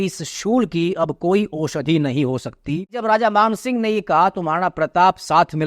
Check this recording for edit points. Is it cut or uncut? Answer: cut